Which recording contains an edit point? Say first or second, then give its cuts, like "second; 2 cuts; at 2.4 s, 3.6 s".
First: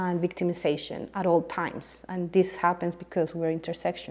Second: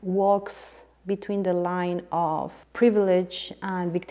second; 1 cut; at 2.6 s